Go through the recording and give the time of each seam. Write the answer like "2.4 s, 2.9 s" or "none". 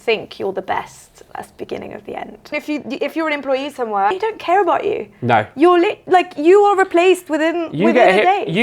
2.5 s, 4.1 s